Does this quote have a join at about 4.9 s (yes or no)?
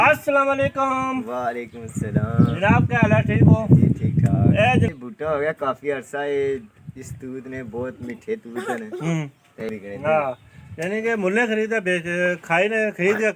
yes